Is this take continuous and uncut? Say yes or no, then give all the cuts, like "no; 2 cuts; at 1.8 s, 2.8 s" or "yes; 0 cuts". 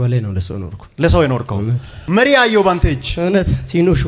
yes; 0 cuts